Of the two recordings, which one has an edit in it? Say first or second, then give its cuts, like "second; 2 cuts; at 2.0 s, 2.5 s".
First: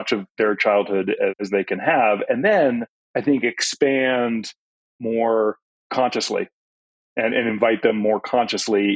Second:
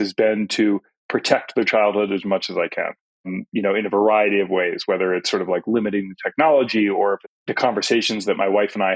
second; 1 cut; at 7.3 s